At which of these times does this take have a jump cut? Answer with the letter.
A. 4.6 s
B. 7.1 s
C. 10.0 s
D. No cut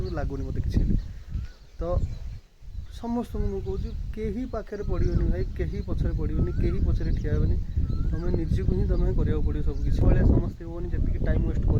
C